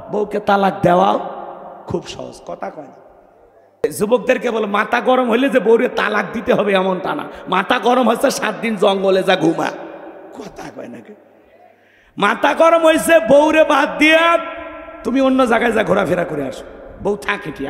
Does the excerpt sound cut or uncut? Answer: cut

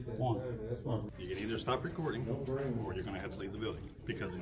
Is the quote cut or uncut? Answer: cut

